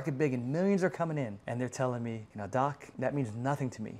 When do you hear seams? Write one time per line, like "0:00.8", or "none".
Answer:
0:01.4
0:02.3
0:02.9